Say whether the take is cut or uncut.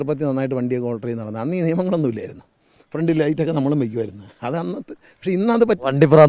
uncut